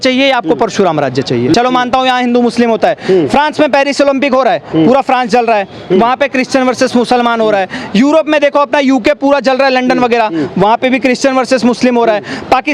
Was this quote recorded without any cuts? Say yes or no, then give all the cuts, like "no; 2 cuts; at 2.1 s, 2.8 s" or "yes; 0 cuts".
no; 1 cut; at 1.5 s